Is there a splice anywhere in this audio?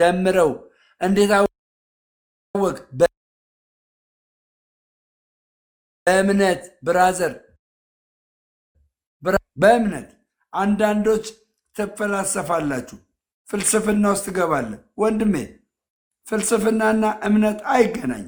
no; 0 cuts

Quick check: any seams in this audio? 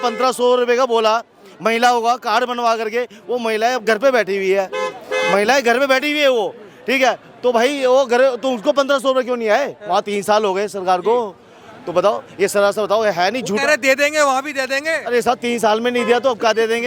no; 0 cuts

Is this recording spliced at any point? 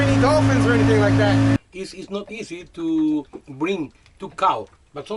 yes; 1 cut; at 1.6 s

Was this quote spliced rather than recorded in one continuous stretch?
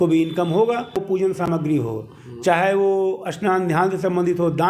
yes; 1 cut; at 1.0 s

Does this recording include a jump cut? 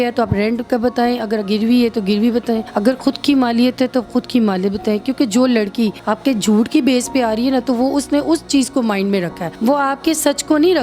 yes; 3 cuts; at 2.7 s, 6.0 s, 9.4 s

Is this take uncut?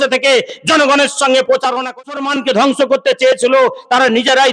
no; 1 cut; at 2.1 s

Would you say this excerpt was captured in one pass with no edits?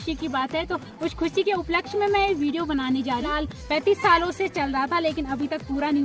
no; 1 cut; at 3.3 s

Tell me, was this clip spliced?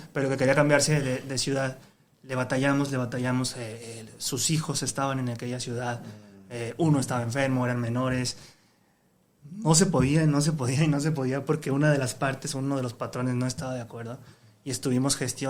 no; 0 cuts

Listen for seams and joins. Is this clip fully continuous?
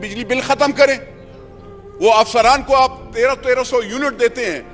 yes; 0 cuts

